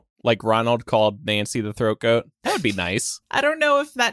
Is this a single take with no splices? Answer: no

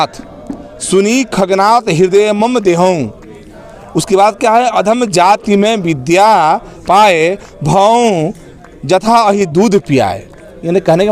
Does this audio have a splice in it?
no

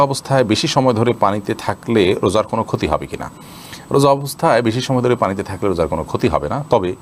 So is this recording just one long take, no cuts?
yes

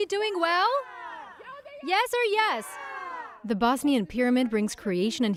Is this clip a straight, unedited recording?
yes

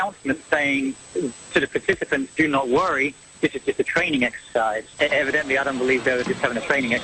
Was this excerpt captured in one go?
no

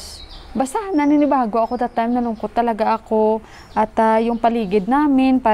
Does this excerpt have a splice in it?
no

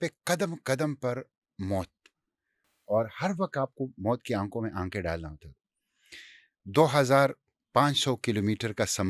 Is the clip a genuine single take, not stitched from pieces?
yes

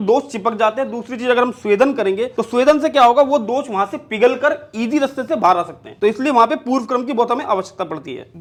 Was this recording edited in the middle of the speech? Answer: no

